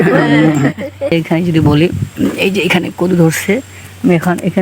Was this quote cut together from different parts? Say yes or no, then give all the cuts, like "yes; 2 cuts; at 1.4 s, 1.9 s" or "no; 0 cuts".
yes; 1 cut; at 1.1 s